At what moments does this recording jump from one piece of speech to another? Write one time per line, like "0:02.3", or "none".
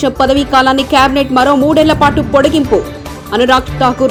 none